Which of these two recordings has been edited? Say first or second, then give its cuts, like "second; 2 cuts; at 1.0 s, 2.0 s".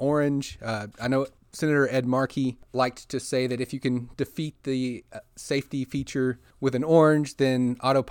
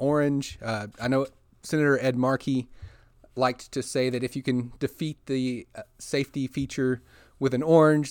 first; 3 cuts; at 1.4 s, 2.6 s, 6.5 s